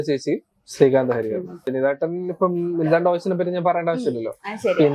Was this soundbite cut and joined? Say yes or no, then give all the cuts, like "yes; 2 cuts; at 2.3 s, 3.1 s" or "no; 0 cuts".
yes; 1 cut; at 1.7 s